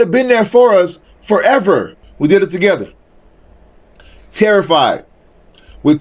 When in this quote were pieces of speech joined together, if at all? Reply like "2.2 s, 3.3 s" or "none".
2.0 s